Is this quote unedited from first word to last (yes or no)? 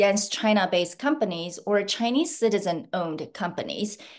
yes